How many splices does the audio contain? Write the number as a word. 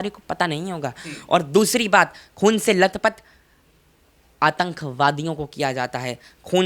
zero